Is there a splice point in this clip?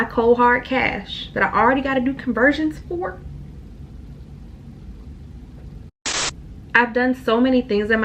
yes; 1 cut; at 6.3 s

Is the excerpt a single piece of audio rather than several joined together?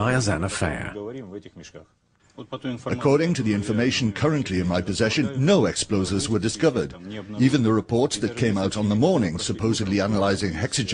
no; 1 cut; at 5.5 s

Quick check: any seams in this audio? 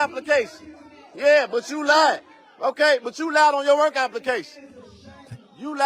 no; 0 cuts

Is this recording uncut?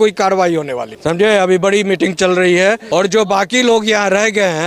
no; 2 cuts; at 0.9 s, 2.8 s

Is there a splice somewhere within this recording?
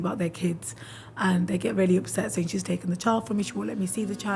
no; 0 cuts

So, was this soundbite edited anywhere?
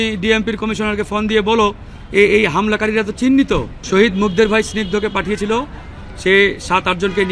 yes; 1 cut; at 3.8 s

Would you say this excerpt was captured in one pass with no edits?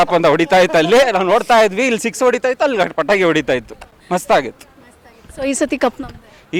yes; 0 cuts

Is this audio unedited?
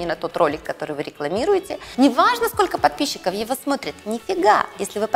no; 1 cut; at 1.8 s

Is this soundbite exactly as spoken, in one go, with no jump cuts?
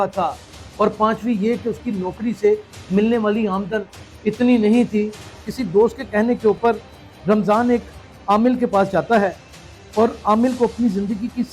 no; 1 cut; at 5.3 s

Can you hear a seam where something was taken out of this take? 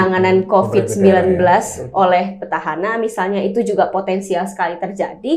no; 0 cuts

